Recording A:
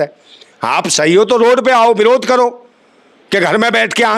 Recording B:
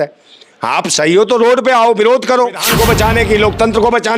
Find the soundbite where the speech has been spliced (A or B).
B